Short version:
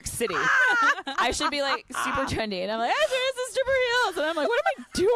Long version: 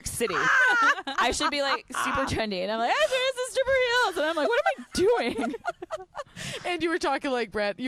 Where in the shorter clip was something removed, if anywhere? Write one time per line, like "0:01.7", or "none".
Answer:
none